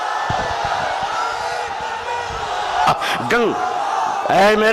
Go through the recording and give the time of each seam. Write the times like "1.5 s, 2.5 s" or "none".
2.9 s